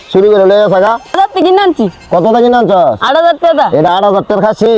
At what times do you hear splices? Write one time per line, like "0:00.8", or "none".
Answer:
0:01.1